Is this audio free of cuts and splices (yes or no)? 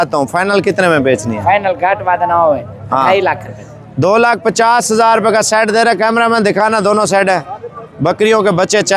yes